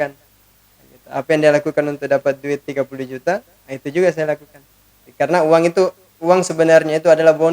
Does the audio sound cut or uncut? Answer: cut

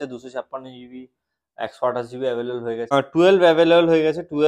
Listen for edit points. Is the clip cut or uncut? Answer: cut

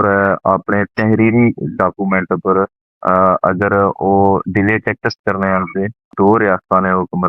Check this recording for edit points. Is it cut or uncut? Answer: cut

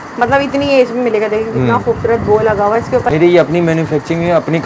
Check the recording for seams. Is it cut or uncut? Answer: cut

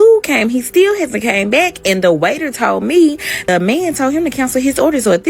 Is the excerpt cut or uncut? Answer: cut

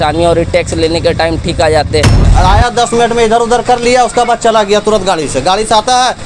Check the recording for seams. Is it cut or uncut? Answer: cut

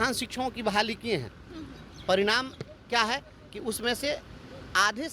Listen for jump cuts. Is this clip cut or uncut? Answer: uncut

